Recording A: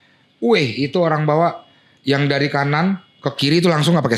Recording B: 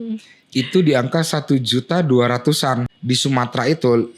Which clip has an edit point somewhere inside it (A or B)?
B